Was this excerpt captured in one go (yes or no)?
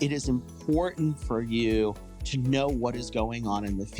no